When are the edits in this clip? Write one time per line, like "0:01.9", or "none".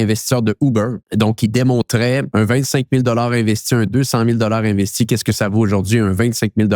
0:01.0
0:02.3